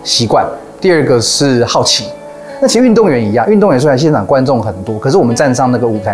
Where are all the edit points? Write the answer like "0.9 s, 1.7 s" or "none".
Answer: 2.2 s

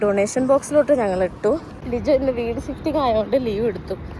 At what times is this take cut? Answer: 1.7 s

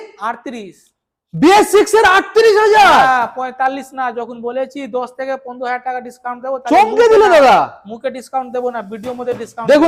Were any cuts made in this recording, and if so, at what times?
none

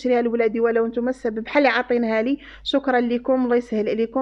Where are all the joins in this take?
none

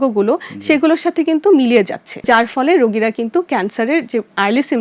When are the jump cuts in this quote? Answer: 2.3 s

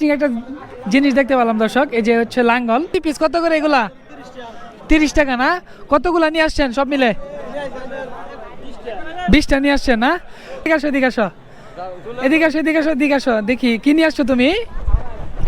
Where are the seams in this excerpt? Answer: 2.9 s, 10.6 s

